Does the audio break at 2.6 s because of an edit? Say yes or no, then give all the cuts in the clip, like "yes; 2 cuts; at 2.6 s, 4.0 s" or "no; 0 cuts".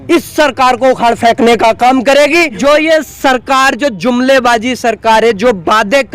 yes; 1 cut; at 2.6 s